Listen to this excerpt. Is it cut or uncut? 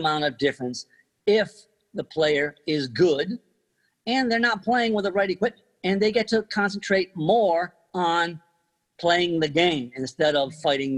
cut